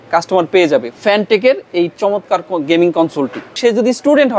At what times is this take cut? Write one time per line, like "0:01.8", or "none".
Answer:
0:00.9
0:03.5